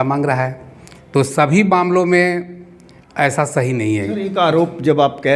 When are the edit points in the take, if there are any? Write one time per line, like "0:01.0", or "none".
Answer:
none